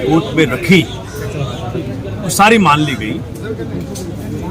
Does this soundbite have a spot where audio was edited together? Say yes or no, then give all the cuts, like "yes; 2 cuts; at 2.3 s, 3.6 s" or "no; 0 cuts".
no; 0 cuts